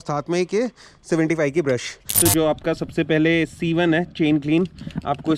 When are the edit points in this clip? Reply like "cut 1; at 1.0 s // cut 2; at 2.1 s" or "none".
cut 1; at 2.0 s